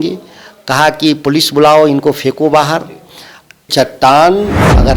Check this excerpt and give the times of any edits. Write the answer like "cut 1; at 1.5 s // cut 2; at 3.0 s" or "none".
cut 1; at 3.7 s